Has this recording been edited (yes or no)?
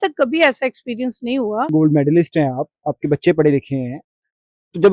yes